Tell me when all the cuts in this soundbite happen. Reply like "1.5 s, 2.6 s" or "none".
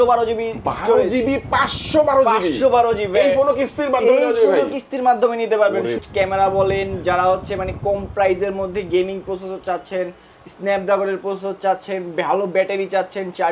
6.0 s